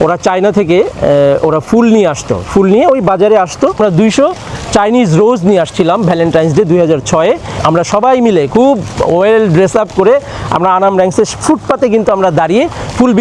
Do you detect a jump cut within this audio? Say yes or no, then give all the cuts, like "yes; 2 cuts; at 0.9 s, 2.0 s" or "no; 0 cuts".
yes; 2 cuts; at 3.8 s, 7.5 s